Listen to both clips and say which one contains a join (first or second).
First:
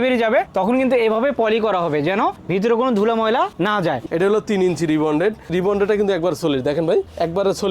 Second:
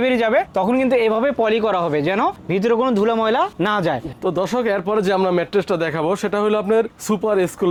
first